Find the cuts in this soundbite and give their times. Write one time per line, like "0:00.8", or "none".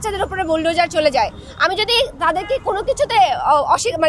none